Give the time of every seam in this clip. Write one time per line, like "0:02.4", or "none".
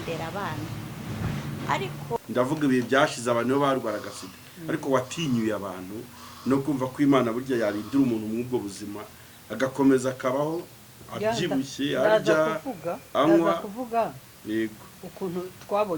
0:02.2